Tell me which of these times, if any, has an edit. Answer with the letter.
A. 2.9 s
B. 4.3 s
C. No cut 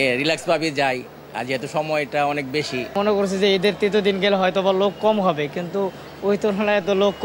A